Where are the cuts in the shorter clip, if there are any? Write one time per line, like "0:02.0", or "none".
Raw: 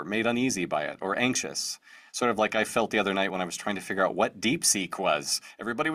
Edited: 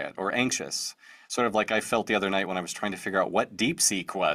none